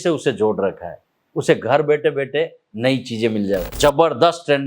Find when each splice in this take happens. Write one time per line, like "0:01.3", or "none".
0:03.7